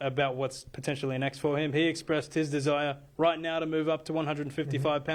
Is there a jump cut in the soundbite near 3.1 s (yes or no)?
no